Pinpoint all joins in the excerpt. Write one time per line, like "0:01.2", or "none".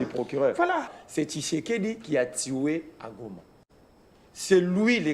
0:00.9